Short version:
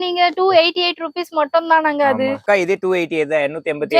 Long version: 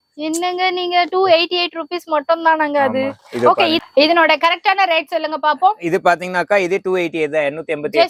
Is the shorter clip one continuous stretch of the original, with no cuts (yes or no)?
no